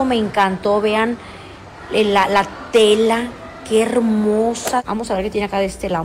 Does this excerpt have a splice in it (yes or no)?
yes